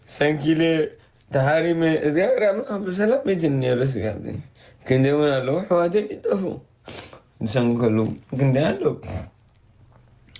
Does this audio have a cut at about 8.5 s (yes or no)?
no